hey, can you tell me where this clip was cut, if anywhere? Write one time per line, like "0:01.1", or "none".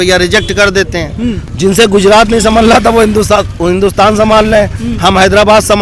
0:01.5